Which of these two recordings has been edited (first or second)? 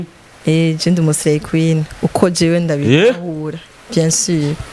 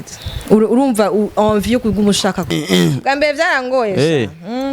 second